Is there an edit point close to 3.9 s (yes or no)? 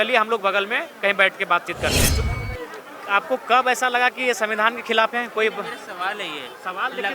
no